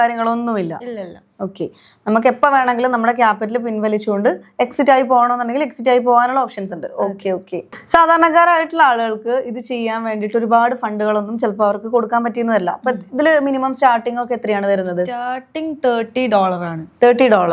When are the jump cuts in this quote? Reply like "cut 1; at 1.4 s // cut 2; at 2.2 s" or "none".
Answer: none

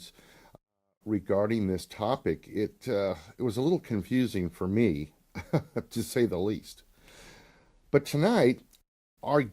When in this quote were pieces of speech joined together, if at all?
cut 1; at 3.4 s

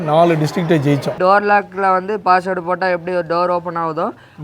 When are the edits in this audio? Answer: cut 1; at 1.2 s

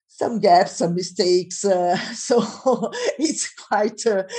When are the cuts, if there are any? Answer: none

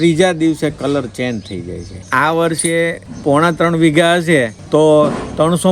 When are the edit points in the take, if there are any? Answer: cut 1; at 2.1 s // cut 2; at 3.1 s // cut 3; at 4.6 s

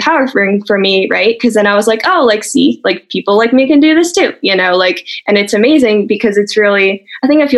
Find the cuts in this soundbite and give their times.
none

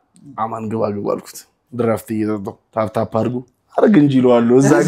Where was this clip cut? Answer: none

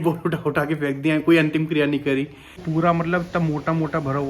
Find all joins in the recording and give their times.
cut 1; at 2.6 s

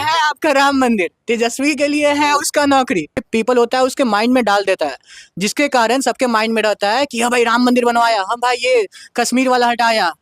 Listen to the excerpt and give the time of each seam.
cut 1; at 3.2 s

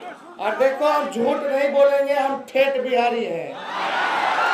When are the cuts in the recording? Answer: none

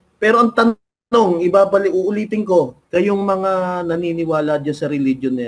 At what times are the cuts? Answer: cut 1; at 2.8 s

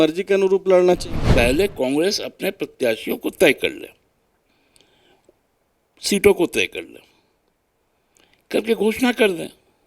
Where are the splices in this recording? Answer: cut 1; at 1.2 s

